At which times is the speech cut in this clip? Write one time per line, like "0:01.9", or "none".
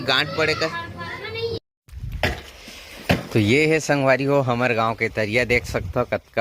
0:01.6